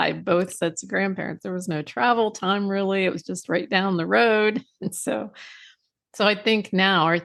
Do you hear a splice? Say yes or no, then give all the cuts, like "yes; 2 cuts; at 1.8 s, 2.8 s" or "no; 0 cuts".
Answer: no; 0 cuts